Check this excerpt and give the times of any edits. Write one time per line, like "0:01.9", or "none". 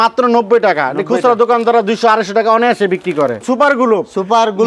0:03.4